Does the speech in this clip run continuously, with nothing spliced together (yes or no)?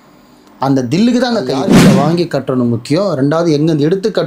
no